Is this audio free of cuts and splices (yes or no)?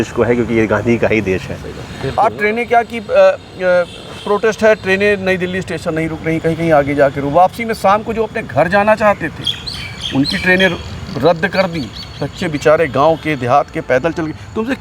no